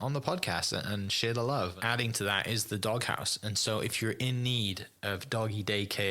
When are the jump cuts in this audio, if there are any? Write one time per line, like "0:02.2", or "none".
0:01.8